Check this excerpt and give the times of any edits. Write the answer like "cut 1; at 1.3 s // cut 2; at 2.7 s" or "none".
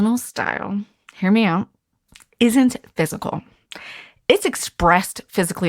none